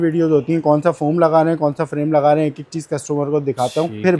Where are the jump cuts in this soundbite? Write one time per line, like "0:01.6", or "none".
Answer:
none

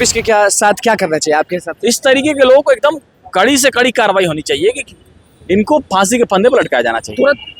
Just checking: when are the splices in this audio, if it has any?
none

